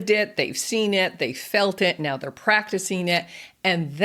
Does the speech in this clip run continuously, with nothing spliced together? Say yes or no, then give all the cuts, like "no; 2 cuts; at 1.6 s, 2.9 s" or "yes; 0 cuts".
yes; 0 cuts